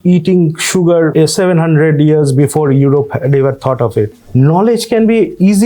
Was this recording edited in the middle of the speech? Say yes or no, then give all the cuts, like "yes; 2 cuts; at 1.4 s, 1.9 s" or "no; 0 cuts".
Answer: yes; 2 cuts; at 1.1 s, 4.2 s